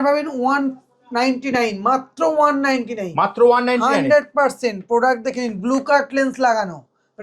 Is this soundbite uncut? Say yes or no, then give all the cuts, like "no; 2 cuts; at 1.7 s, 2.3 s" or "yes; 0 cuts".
yes; 0 cuts